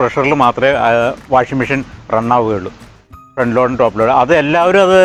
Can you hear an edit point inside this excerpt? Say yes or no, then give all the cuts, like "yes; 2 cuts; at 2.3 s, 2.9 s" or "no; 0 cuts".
no; 0 cuts